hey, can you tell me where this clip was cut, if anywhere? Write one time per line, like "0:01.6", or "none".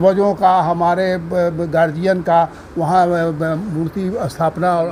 none